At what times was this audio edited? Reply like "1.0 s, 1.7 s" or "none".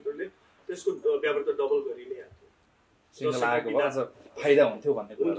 none

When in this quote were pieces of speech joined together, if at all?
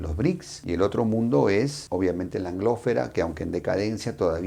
none

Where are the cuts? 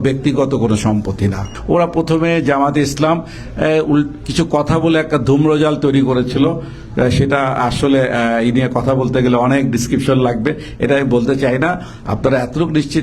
1.5 s

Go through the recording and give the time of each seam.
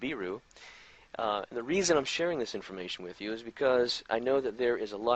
none

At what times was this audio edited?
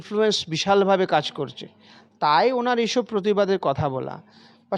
none

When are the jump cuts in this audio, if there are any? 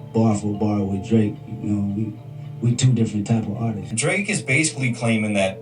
3.8 s

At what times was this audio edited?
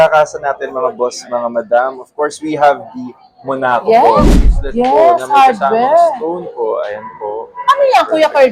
4.3 s

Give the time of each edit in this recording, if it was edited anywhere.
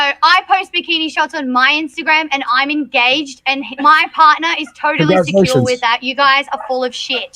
none

